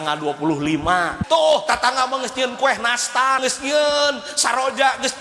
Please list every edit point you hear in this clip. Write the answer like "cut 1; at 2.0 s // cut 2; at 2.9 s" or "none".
cut 1; at 1.2 s // cut 2; at 3.4 s